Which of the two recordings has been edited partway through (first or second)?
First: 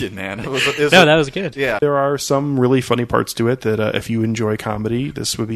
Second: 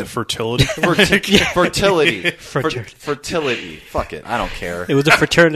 first